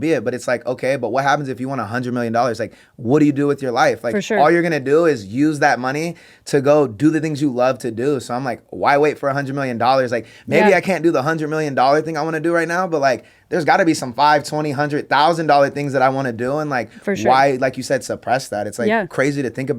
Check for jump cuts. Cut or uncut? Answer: uncut